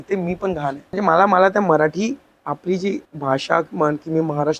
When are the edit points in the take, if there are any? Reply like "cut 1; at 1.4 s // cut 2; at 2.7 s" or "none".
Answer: cut 1; at 1.0 s // cut 2; at 3.1 s